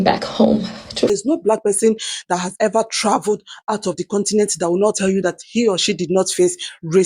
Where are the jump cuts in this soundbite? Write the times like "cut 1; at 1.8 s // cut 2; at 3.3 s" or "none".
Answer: cut 1; at 1.1 s